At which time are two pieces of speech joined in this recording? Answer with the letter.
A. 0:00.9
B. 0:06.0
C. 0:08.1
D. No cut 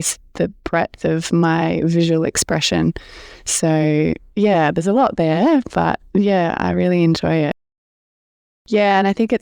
C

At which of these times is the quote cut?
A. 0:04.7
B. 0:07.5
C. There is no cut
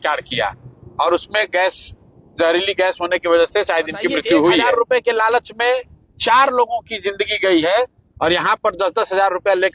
A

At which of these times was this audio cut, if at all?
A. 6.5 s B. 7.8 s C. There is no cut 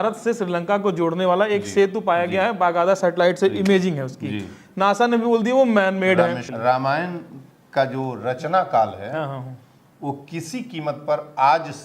A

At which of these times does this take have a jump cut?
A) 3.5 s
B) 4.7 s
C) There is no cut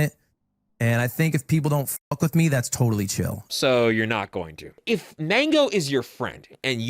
B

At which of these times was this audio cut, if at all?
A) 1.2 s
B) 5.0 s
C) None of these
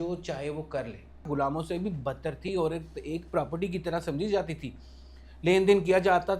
A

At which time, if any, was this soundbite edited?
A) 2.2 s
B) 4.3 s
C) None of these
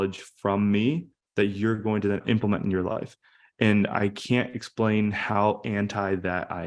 A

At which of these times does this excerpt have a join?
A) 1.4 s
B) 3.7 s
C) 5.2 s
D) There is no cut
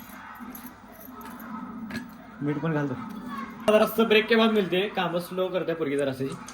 B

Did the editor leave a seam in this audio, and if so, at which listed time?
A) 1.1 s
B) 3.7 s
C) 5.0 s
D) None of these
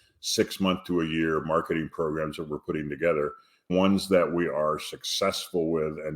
B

